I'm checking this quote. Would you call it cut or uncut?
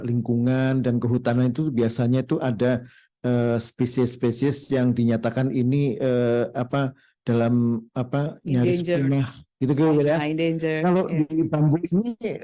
uncut